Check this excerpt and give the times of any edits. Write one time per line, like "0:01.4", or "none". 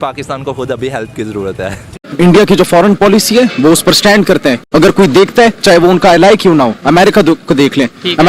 0:02.0
0:04.6